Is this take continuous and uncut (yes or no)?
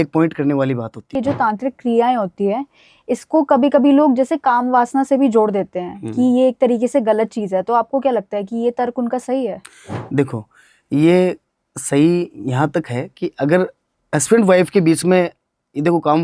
no